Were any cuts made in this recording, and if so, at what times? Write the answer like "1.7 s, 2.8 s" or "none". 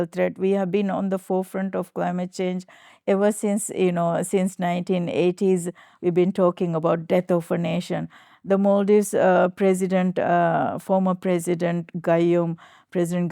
none